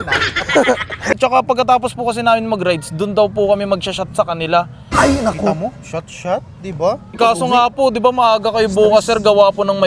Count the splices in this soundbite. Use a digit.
2